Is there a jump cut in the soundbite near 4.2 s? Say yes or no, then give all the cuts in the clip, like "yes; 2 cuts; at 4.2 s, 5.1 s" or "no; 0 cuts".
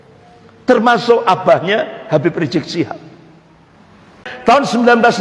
yes; 1 cut; at 4.2 s